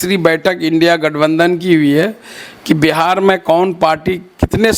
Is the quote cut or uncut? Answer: uncut